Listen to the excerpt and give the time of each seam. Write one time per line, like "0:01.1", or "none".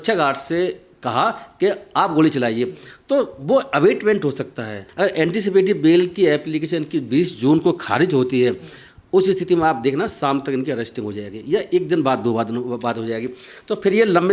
0:04.8